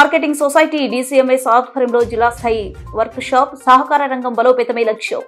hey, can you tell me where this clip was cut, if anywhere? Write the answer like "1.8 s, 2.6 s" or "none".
none